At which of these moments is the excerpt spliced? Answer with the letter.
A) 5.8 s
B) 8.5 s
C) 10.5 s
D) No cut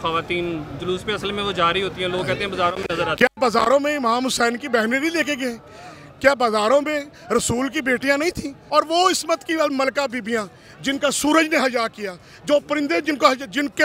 B